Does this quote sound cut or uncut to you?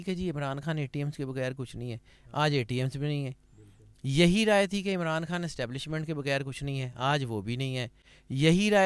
uncut